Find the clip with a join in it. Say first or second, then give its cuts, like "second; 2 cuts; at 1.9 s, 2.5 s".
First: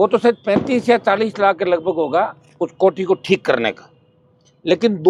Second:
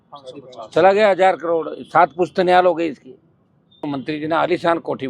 second; 1 cut; at 3.8 s